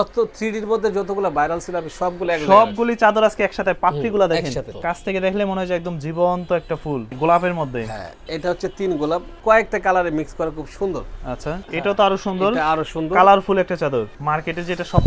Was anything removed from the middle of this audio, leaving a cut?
yes; 5 cuts; at 4.8 s, 7.1 s, 9.3 s, 11.6 s, 14.2 s

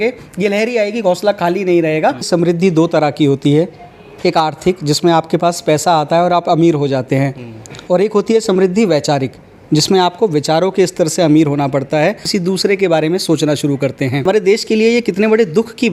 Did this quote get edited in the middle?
yes; 3 cuts; at 2.3 s, 12.3 s, 14.2 s

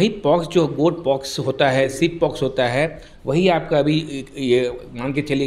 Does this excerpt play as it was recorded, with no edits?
yes; 0 cuts

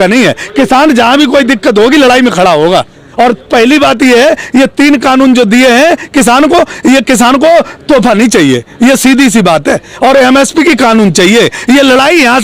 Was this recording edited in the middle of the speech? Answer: no; 0 cuts

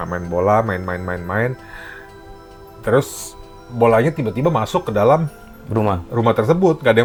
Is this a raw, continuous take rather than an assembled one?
yes; 0 cuts

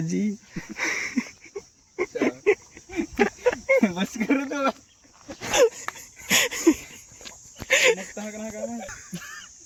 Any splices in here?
no; 0 cuts

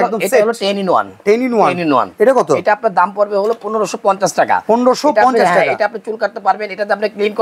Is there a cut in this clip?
no; 0 cuts

